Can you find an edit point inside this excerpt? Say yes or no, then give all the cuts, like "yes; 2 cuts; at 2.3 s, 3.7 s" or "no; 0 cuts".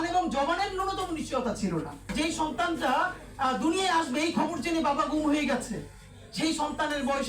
yes; 1 cut; at 2.1 s